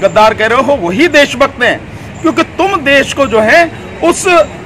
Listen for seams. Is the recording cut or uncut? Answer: uncut